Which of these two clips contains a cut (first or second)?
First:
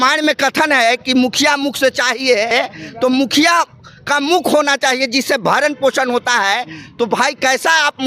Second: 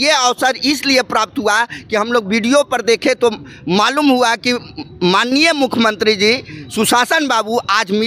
first